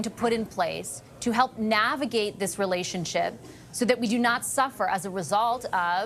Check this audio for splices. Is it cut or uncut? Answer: uncut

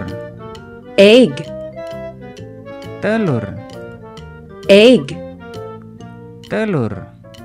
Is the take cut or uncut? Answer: cut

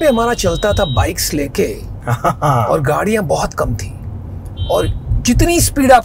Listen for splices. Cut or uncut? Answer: uncut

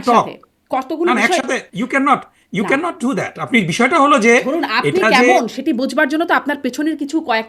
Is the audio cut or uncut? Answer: uncut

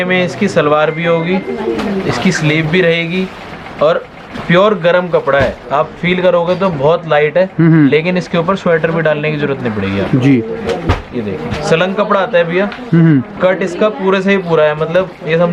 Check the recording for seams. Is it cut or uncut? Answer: uncut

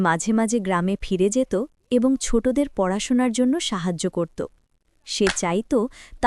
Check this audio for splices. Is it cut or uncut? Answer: uncut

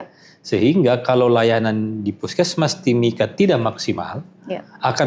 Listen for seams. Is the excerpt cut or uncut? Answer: uncut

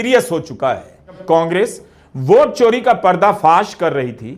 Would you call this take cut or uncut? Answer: cut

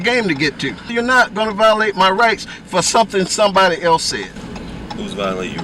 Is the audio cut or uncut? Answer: cut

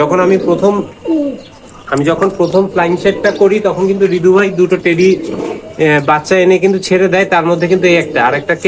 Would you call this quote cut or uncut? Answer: uncut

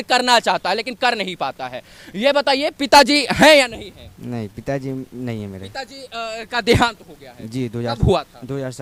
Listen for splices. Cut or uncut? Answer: uncut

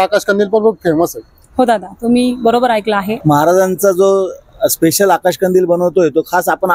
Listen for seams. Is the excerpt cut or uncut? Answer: cut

